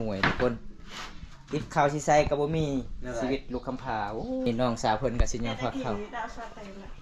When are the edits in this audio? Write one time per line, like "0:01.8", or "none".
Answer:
0:04.5